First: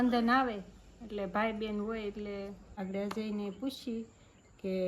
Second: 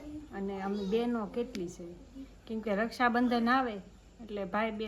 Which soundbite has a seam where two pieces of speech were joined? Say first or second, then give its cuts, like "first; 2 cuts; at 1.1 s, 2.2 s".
first; 1 cut; at 2.7 s